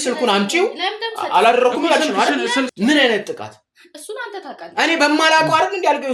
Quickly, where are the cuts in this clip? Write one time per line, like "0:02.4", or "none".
0:02.7